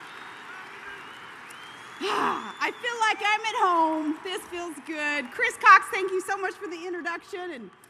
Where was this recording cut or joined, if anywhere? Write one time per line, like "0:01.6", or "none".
0:06.4